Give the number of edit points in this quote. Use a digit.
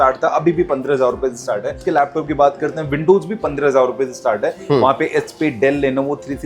1